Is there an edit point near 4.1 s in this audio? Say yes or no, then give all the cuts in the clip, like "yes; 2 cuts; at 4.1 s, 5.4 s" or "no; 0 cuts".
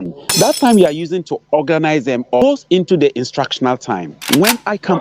yes; 2 cuts; at 2.4 s, 4.1 s